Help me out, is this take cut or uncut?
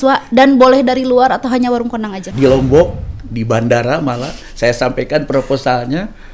cut